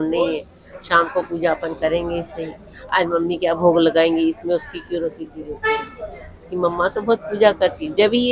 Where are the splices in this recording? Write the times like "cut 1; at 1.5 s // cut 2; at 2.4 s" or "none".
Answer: none